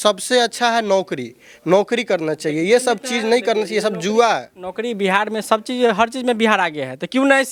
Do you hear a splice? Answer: no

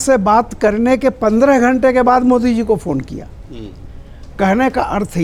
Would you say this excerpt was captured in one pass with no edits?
yes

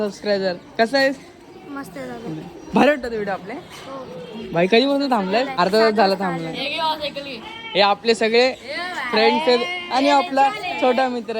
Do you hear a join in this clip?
yes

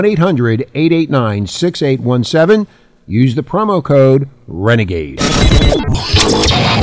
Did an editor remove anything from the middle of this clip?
yes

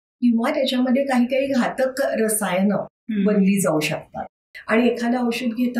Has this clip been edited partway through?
yes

